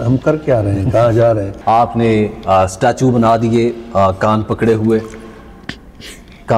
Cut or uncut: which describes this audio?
uncut